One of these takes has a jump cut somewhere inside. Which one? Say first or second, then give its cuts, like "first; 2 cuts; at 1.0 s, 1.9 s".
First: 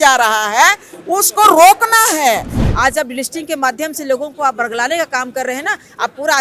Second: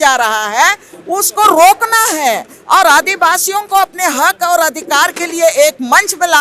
first; 1 cut; at 2.5 s